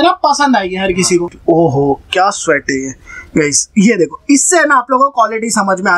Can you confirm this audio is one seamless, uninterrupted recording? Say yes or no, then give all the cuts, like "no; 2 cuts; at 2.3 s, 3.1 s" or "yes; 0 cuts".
no; 1 cut; at 1.3 s